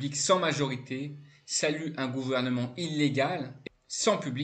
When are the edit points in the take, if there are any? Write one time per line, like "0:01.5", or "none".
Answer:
0:03.5

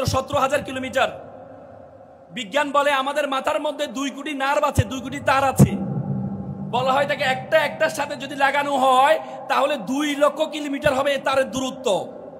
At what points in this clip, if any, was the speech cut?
none

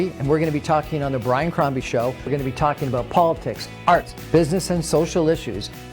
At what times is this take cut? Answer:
0:04.2

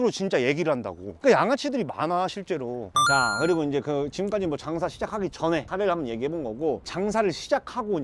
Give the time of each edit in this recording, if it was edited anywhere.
none

